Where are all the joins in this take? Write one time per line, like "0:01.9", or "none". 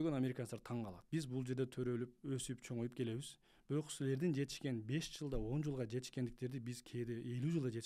0:01.0